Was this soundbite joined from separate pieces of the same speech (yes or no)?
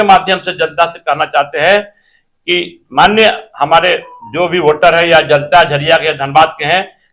no